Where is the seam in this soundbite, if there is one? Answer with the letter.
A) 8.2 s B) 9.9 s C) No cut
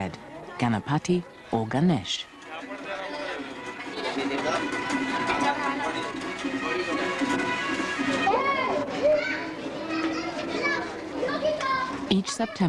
C